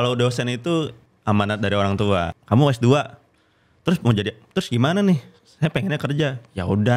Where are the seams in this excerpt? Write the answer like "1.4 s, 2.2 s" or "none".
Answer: 1.0 s, 2.3 s